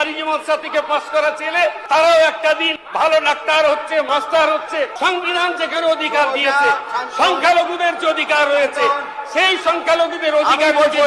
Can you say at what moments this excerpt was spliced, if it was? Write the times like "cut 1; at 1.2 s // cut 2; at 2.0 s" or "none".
cut 1; at 1.8 s // cut 2; at 2.8 s // cut 3; at 4.1 s // cut 4; at 4.9 s